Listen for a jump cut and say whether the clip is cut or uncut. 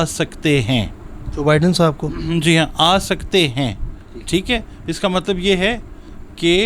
uncut